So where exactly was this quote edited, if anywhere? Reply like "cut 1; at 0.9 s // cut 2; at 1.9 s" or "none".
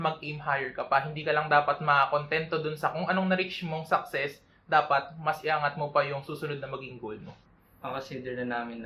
cut 1; at 7.4 s